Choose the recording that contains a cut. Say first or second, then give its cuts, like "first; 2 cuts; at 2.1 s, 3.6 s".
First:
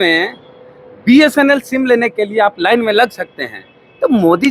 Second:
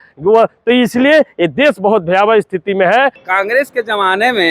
second; 1 cut; at 3.2 s